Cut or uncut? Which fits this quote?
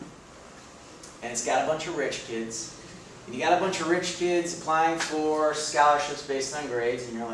cut